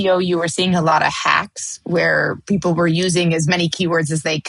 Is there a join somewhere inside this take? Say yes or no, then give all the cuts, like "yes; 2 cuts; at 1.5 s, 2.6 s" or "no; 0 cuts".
no; 0 cuts